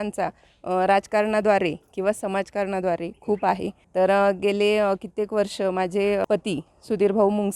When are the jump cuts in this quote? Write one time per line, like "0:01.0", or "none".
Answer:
0:03.8
0:06.2